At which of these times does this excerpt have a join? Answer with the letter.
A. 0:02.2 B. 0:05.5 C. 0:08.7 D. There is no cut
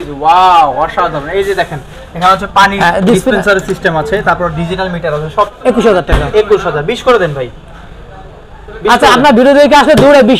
B